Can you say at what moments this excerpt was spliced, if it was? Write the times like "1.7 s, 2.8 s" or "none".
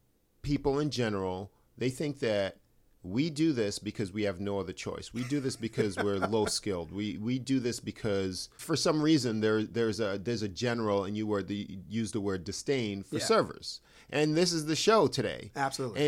8.5 s